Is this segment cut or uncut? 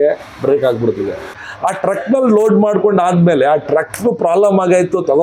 cut